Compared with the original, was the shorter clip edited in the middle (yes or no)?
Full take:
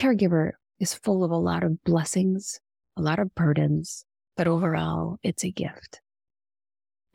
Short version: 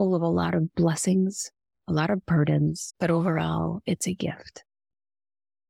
yes